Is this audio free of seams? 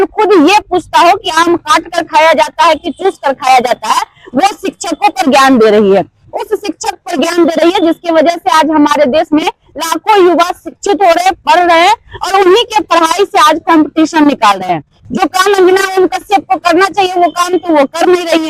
no; 1 cut; at 15.0 s

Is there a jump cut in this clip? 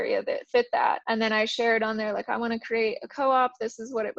yes; 1 cut; at 1.0 s

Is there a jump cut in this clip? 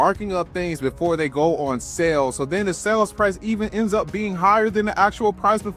no; 0 cuts

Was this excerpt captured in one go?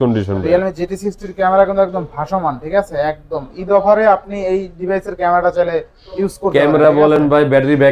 yes; 0 cuts

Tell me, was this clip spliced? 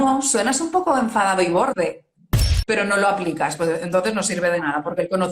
yes; 1 cut; at 2.5 s

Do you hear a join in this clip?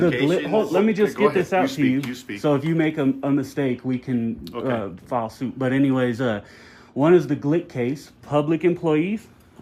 no; 0 cuts

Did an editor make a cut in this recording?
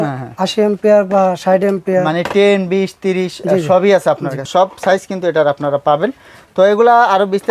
no; 0 cuts

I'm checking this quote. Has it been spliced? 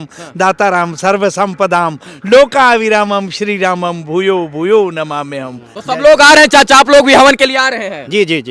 no; 0 cuts

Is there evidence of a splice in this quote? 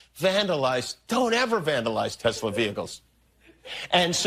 no; 0 cuts

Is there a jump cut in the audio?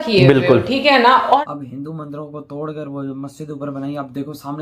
yes; 1 cut; at 1.4 s

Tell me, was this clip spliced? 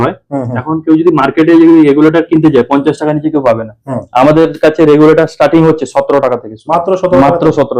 no; 0 cuts

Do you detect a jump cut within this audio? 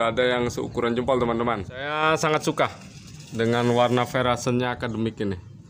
yes; 1 cut; at 1.9 s

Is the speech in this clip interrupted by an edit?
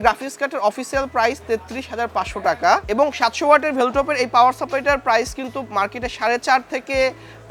no; 0 cuts

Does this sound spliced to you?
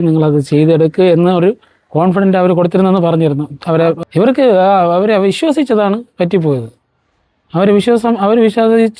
yes; 1 cut; at 4.0 s

